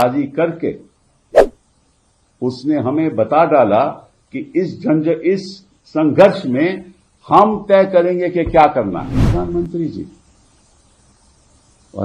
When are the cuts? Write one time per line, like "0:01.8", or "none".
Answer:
0:09.2